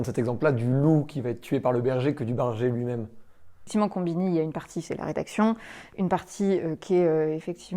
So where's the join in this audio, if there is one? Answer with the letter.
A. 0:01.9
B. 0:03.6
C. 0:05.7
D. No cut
B